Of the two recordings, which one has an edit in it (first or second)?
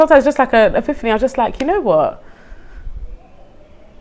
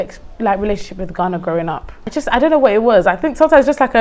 second